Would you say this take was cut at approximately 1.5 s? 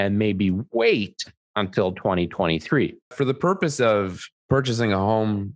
no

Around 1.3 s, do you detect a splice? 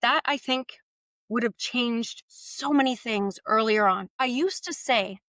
no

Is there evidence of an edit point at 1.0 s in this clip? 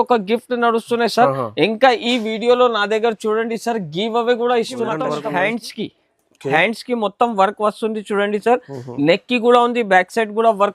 no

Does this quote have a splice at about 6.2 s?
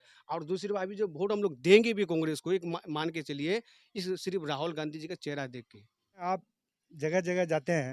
yes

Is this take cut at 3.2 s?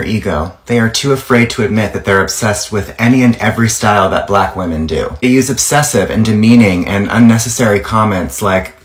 no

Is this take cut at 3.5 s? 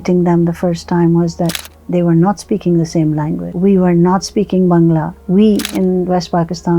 yes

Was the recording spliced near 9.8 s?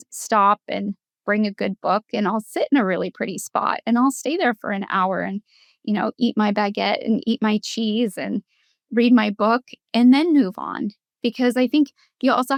no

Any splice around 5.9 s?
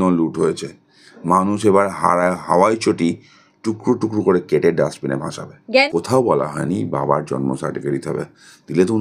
yes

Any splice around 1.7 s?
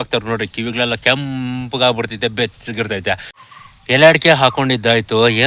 no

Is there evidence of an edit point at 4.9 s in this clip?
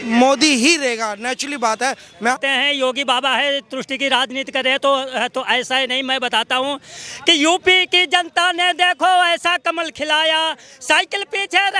no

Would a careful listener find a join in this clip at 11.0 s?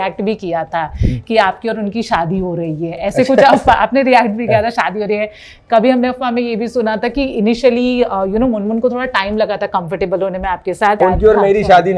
yes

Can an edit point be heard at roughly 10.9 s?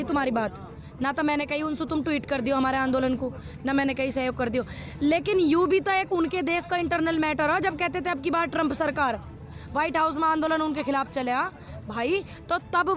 no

